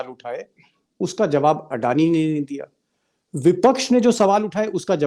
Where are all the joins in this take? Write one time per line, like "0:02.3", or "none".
none